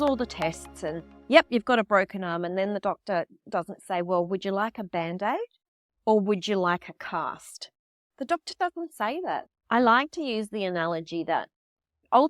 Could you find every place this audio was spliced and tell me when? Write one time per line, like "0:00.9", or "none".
0:09.5